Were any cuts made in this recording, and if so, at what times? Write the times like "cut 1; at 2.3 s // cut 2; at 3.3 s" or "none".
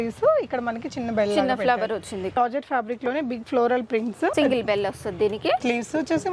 cut 1; at 2.4 s

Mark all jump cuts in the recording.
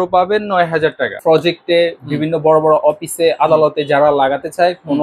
cut 1; at 1.1 s

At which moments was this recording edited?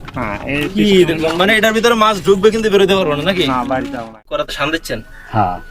cut 1; at 4.1 s

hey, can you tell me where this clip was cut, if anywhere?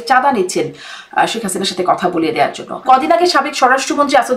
cut 1; at 2.8 s

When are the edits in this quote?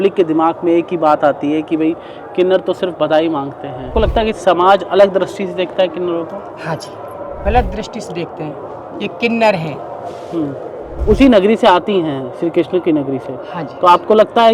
cut 1; at 3.9 s // cut 2; at 7.4 s // cut 3; at 11.0 s

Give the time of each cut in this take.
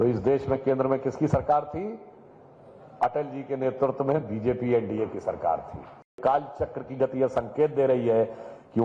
cut 1; at 6.1 s

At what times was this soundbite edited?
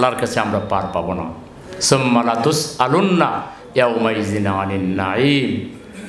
none

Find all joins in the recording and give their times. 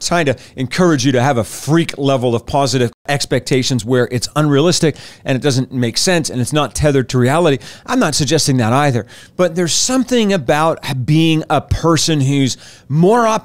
cut 1; at 3.0 s

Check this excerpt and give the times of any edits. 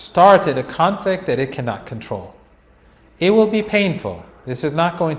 none

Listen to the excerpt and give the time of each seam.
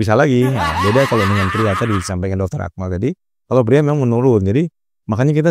none

